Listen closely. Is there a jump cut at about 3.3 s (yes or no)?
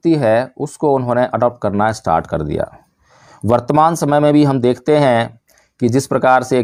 no